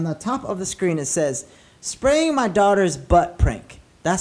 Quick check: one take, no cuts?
yes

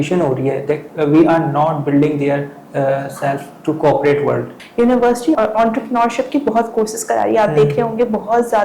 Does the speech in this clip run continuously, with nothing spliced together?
no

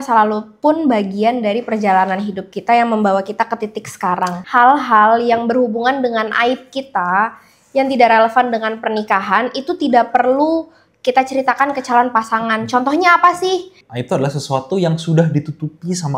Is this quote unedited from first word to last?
no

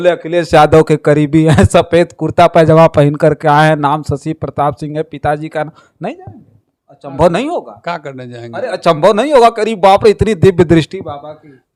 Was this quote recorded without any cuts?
yes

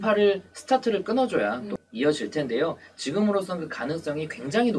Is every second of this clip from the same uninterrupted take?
no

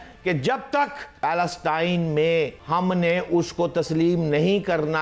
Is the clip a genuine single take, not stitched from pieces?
no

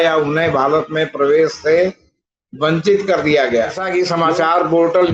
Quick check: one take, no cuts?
no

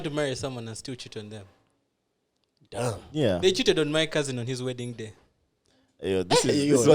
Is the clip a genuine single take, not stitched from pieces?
yes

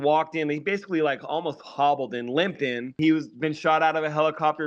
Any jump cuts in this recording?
yes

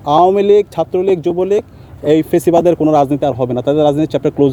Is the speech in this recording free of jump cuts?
yes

